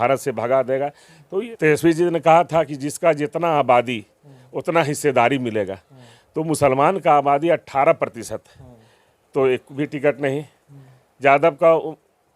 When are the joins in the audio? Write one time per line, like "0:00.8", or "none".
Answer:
0:01.5